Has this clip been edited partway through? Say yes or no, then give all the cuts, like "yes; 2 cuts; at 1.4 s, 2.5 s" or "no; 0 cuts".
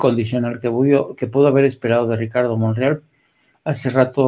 no; 0 cuts